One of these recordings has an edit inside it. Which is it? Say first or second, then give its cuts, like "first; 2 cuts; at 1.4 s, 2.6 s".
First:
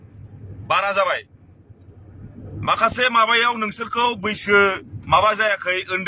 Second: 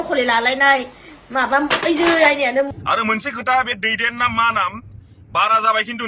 second; 1 cut; at 2.8 s